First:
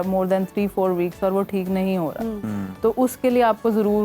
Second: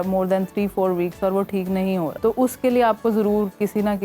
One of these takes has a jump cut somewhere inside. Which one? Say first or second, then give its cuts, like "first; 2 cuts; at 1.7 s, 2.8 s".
second; 1 cut; at 2.1 s